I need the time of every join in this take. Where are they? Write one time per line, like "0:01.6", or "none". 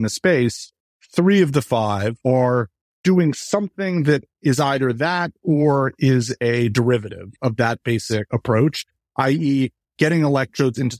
0:02.2
0:07.3
0:08.3